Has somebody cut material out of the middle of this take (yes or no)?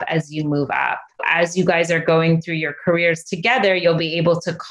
yes